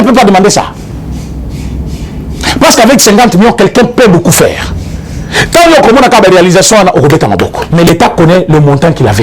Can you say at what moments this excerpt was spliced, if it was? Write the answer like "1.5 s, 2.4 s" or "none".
7.6 s